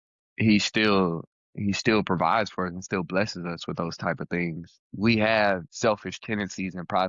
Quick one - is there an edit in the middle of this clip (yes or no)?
yes